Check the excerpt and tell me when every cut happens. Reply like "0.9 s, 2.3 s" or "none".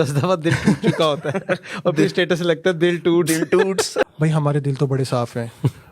4.1 s